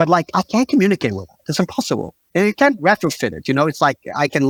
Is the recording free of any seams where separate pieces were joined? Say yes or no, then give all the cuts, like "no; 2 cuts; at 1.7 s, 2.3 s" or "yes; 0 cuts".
yes; 0 cuts